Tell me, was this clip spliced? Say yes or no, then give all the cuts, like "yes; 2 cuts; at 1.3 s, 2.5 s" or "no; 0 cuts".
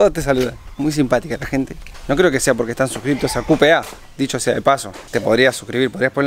no; 0 cuts